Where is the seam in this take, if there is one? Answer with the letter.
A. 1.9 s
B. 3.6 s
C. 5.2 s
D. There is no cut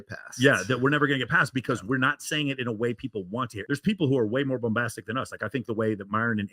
B